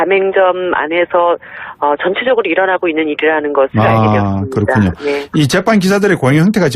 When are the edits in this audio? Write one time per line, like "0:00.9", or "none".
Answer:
0:04.0